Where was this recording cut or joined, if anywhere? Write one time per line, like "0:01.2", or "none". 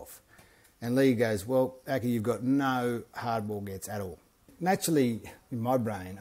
0:04.5